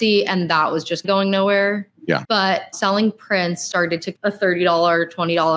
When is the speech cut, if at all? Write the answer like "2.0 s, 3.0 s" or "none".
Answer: 1.0 s, 2.7 s, 4.1 s